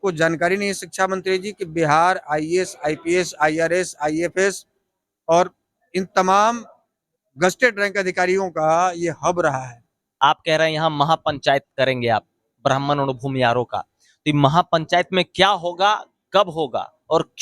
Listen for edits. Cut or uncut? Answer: cut